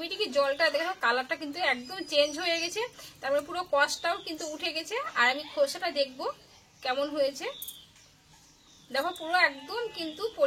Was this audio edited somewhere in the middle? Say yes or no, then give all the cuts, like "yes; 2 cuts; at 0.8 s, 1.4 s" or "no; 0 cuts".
no; 0 cuts